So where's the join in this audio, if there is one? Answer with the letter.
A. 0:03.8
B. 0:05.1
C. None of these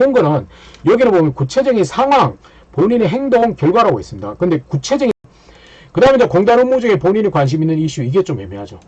B